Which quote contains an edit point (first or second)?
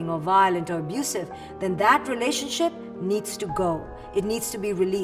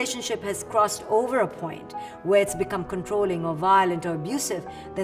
first